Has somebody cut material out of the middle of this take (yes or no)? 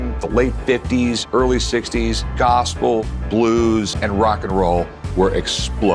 yes